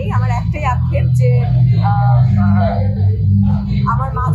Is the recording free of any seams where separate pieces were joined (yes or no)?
yes